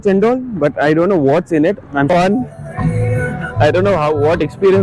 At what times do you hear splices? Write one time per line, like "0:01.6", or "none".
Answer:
0:02.1